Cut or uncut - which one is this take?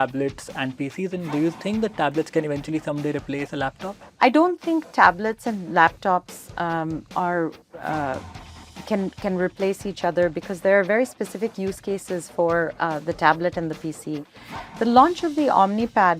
cut